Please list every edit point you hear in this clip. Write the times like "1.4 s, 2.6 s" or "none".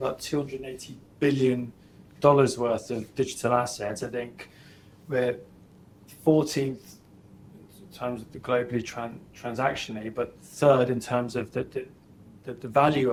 none